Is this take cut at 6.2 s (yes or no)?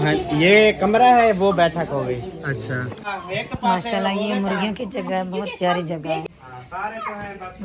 yes